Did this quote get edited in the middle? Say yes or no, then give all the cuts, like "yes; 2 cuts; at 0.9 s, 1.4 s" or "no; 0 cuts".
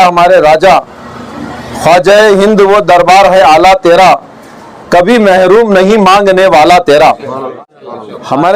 no; 0 cuts